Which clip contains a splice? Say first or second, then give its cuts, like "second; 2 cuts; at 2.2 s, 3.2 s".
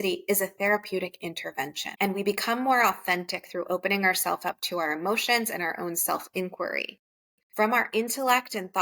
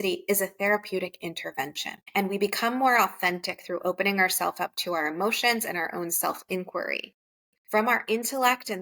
first; 1 cut; at 1.8 s